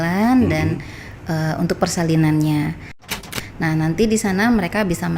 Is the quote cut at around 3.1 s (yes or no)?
yes